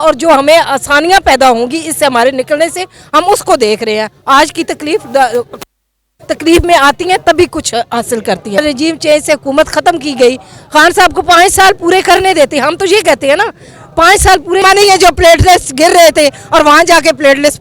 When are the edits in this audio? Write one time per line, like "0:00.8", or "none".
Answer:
0:08.6
0:14.6